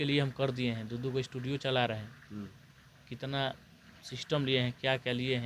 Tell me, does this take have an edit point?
no; 0 cuts

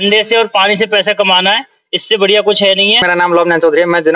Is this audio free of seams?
no; 1 cut; at 3.0 s

